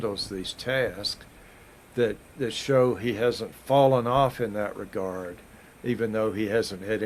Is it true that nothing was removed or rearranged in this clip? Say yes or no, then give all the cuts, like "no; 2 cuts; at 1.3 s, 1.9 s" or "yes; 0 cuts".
yes; 0 cuts